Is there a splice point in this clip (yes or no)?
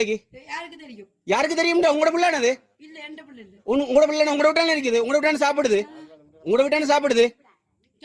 yes